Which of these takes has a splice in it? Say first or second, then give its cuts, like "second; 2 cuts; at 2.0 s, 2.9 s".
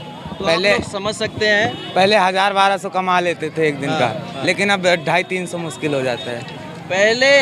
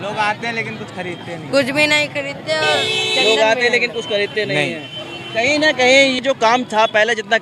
second; 1 cut; at 6.2 s